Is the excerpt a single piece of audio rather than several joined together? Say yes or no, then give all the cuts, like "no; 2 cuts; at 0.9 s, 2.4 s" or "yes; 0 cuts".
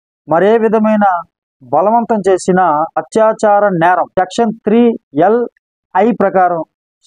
no; 3 cuts; at 3.0 s, 4.1 s, 5.0 s